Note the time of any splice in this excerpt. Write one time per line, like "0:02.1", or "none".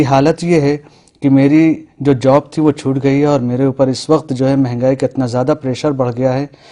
0:01.9